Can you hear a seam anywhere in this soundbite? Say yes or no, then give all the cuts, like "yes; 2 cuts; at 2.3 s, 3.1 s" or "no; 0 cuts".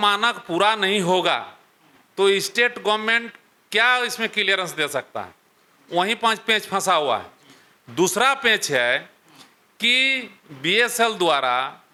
no; 0 cuts